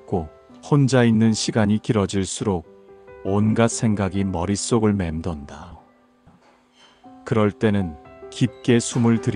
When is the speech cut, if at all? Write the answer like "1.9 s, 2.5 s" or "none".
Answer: none